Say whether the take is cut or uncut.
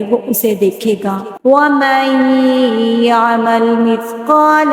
cut